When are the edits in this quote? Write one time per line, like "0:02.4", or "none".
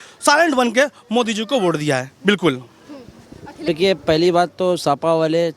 0:03.6